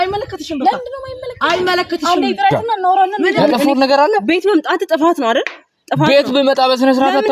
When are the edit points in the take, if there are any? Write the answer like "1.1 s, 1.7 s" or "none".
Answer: 3.4 s

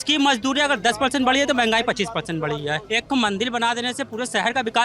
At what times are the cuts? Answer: 2.8 s

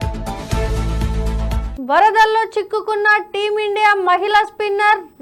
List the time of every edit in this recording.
1.7 s

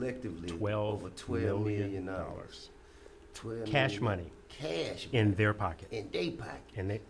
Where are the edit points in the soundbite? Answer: none

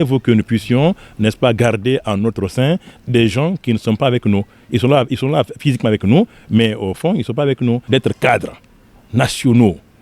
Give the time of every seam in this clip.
7.8 s

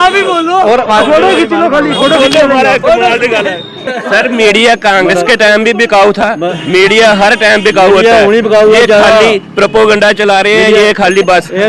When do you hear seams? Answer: 3.8 s

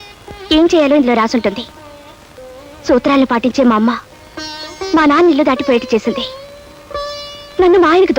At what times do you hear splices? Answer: none

